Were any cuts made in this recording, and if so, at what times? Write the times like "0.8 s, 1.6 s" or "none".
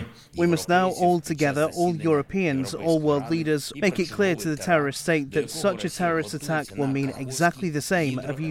3.7 s, 6.7 s

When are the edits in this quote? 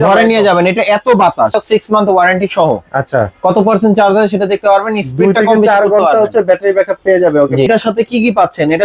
1.5 s, 7.7 s

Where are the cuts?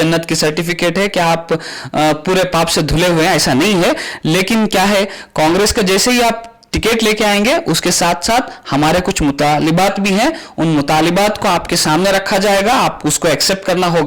none

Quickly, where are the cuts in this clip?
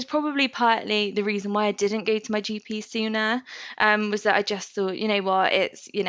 none

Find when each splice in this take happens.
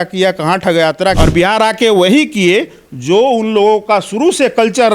1.2 s

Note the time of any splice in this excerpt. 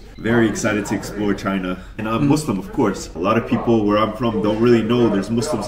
1.9 s, 3.1 s

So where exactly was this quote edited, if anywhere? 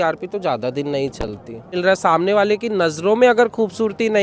1.7 s

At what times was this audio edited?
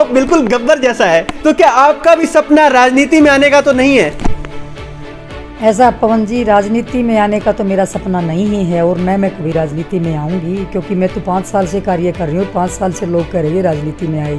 1.3 s

